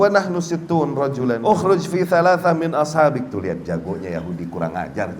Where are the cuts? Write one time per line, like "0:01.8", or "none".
0:01.4